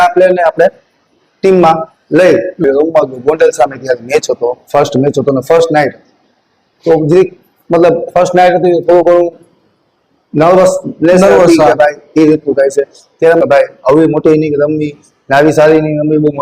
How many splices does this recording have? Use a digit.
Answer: 2